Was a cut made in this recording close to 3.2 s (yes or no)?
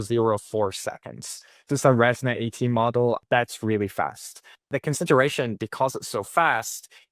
yes